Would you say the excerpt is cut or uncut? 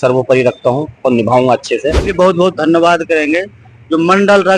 cut